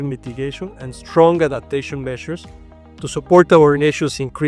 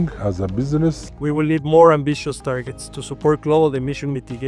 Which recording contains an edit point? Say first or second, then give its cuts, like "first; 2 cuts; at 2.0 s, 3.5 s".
second; 1 cut; at 1.1 s